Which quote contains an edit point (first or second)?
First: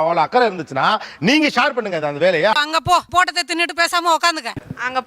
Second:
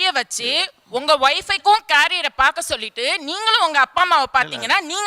first